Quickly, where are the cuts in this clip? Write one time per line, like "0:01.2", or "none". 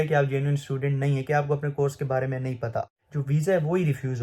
0:02.8